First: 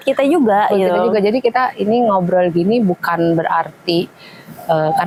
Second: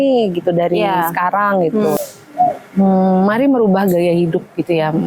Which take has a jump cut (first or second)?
second